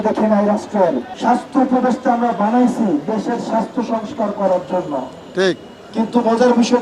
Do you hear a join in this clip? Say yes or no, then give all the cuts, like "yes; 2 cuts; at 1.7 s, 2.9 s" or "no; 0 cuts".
yes; 1 cut; at 1.1 s